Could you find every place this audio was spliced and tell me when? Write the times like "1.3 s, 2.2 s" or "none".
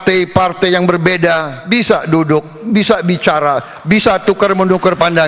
1.5 s